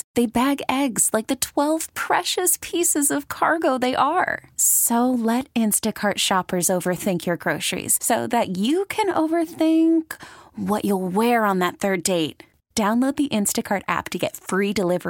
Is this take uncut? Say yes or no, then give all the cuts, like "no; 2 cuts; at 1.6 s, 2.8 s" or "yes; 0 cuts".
yes; 0 cuts